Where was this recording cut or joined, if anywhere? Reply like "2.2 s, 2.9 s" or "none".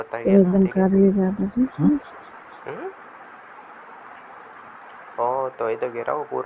2.1 s